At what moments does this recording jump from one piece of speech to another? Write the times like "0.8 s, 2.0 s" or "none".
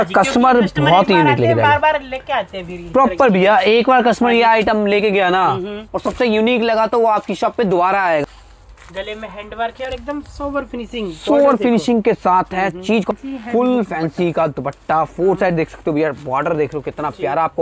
8.2 s, 13.1 s